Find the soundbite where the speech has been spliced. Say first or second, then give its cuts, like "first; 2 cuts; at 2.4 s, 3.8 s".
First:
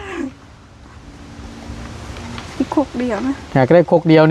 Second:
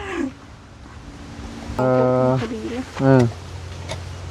second; 1 cut; at 1.8 s